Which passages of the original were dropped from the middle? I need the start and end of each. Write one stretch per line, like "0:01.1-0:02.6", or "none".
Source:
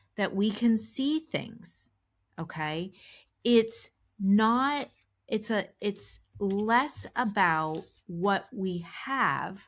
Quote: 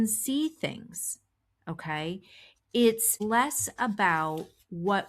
0:03.9-0:06.6